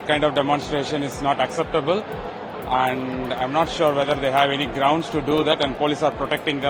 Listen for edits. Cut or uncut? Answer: uncut